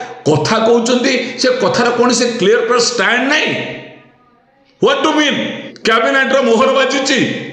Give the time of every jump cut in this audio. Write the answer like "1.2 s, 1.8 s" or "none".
5.7 s